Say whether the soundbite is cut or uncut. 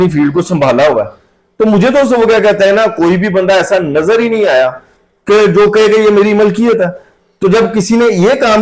uncut